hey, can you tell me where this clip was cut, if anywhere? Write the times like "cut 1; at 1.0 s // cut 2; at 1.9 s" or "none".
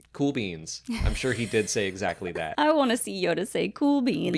cut 1; at 2.5 s